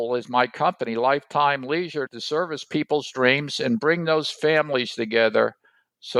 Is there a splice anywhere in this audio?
no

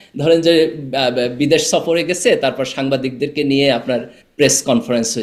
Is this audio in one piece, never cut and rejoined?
yes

